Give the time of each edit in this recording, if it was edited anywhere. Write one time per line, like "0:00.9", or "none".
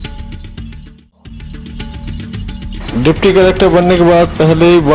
0:01.5
0:02.8